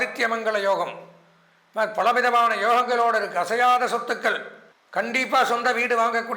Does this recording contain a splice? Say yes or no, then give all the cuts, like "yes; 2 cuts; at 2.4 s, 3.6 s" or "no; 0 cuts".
no; 0 cuts